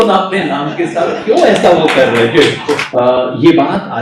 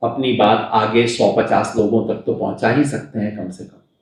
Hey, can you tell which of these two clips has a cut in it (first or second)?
first